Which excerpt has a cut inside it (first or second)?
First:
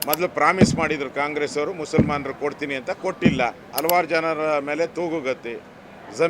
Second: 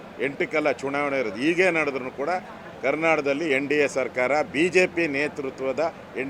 first